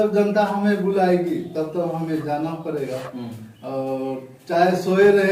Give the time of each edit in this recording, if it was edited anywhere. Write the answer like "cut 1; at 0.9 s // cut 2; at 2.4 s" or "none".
none